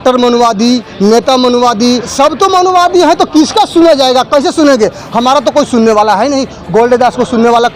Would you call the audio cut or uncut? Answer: cut